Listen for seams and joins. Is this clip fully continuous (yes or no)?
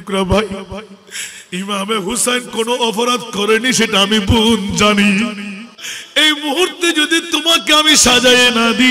no